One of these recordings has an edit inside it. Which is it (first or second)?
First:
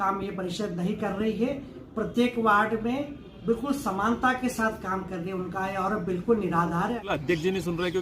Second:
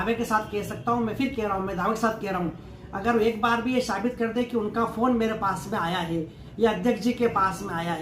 first